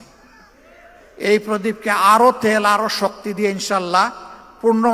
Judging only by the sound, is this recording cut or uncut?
cut